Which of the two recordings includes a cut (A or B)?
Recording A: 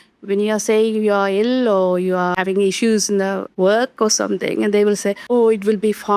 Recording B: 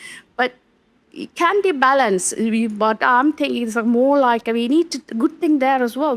A